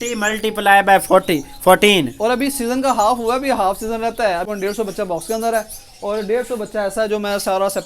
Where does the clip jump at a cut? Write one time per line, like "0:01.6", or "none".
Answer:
0:04.5